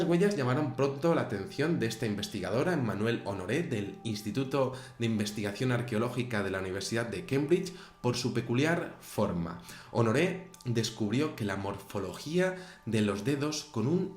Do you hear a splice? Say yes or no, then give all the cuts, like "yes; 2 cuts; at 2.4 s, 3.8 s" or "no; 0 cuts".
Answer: yes; 1 cut; at 2.3 s